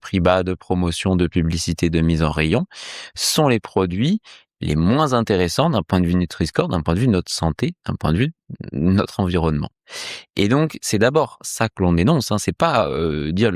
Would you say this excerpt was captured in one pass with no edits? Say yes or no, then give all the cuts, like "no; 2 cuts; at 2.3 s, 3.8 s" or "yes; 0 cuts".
yes; 0 cuts